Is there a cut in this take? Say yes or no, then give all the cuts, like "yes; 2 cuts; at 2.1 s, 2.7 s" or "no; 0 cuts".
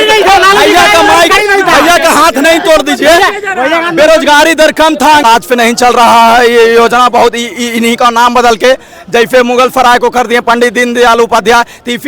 yes; 1 cut; at 5.2 s